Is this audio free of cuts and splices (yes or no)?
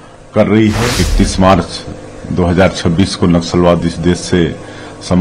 no